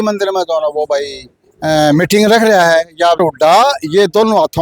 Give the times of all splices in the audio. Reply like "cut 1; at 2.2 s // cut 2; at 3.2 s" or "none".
cut 1; at 3.2 s